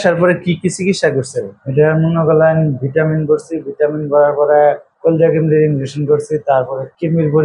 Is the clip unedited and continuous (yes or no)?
yes